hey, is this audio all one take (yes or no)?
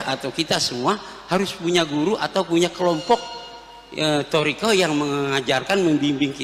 yes